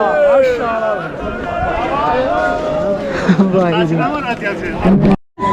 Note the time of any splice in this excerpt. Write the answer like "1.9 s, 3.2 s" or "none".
none